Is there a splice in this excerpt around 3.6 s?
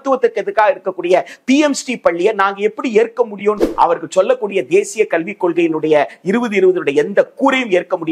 yes; 1 cut; at 3.6 s

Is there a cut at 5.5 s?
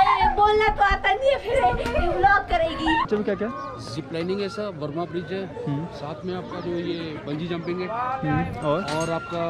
no; 1 cut; at 3.1 s

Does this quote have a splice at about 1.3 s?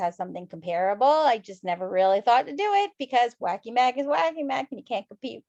no; 0 cuts

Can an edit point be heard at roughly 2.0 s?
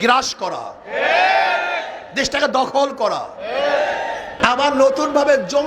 no; 1 cut; at 4.3 s

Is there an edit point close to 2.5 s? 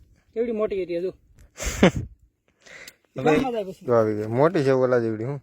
no; 1 cut; at 3.7 s

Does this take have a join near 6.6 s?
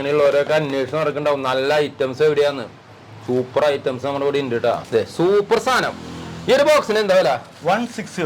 no; 1 cut; at 4.8 s

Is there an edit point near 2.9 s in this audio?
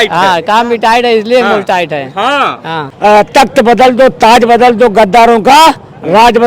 yes; 1 cut; at 2.9 s

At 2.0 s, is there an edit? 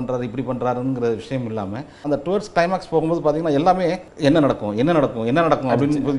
yes; 2 cuts; at 2.0 s, 4.1 s

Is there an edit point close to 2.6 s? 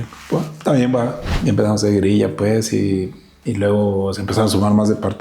no; 1 cut; at 1.3 s

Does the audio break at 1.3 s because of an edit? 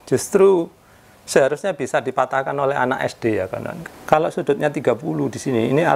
no; 1 cut; at 3.7 s

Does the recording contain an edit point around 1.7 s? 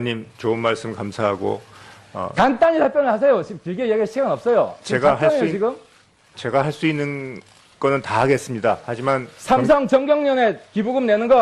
no; 0 cuts

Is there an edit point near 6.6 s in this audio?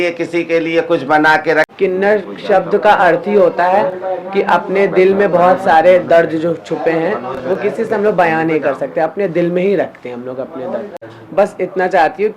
no; 2 cuts; at 1.7 s, 11.0 s

